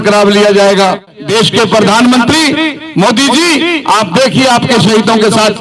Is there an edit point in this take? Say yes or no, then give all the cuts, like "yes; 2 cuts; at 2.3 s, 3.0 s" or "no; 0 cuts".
yes; 1 cut; at 1.2 s